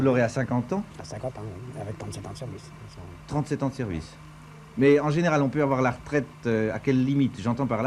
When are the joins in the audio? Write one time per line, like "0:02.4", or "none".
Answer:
0:02.8